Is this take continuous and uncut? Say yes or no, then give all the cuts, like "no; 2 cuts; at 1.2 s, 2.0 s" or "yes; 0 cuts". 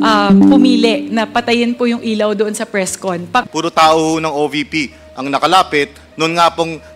no; 1 cut; at 3.4 s